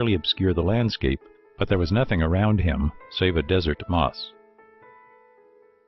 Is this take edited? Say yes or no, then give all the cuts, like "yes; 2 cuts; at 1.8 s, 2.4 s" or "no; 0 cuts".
yes; 1 cut; at 3.3 s